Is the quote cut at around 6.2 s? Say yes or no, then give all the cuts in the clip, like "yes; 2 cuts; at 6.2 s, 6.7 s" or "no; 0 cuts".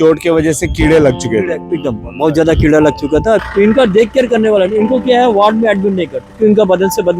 yes; 2 cuts; at 3.4 s, 6.2 s